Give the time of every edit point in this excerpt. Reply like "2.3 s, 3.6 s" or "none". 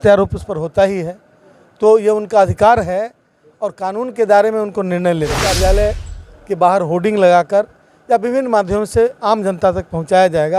5.5 s